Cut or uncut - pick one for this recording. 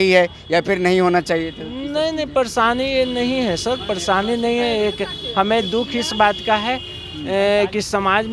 uncut